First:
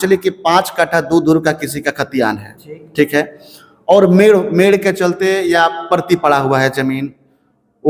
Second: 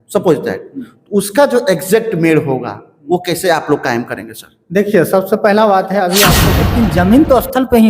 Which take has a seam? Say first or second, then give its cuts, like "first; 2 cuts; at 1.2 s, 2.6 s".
second; 1 cut; at 6.4 s